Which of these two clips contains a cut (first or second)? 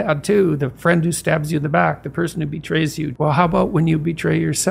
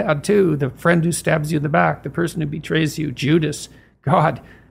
first